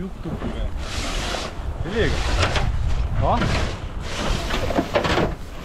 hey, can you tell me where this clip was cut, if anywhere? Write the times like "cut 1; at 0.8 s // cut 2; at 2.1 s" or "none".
none